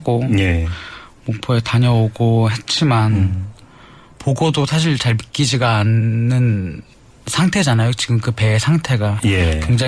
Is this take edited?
no; 0 cuts

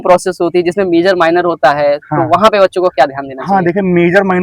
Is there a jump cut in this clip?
no; 0 cuts

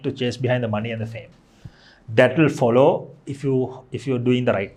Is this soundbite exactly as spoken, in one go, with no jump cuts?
yes; 0 cuts

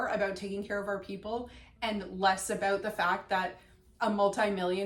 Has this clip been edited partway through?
no; 0 cuts

